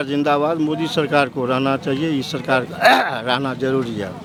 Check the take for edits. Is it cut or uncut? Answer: uncut